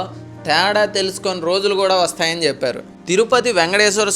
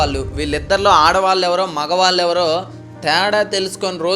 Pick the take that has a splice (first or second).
first